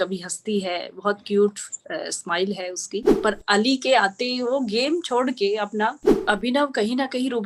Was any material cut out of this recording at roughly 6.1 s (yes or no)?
yes